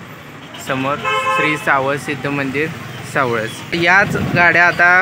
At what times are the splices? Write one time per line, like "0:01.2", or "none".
0:03.8